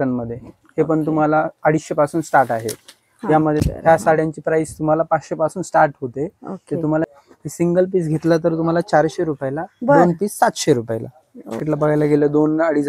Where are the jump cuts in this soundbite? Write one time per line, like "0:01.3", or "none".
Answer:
0:03.6
0:07.0
0:11.6